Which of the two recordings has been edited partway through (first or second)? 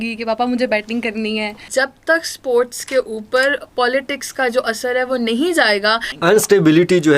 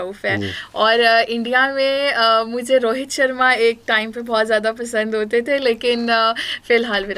first